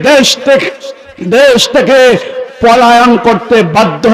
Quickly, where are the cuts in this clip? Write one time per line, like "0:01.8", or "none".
none